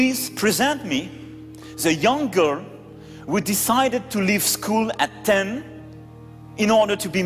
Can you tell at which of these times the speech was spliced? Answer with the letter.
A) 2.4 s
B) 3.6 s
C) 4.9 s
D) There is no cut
D